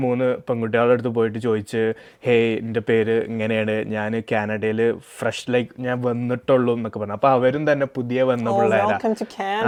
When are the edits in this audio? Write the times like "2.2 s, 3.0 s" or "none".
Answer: none